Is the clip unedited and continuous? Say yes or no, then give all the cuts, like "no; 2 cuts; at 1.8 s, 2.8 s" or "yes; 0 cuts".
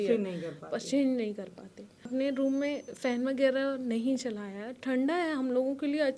no; 1 cut; at 2.1 s